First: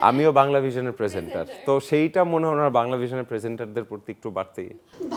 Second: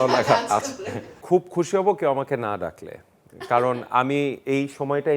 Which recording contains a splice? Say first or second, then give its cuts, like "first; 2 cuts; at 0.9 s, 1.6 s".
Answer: second; 1 cut; at 1.2 s